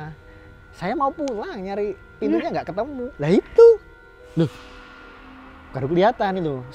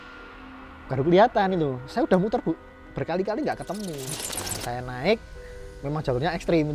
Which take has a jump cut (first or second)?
second